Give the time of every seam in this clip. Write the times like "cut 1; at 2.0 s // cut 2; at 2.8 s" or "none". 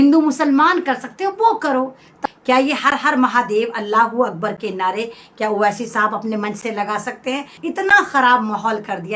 cut 1; at 2.1 s // cut 2; at 7.5 s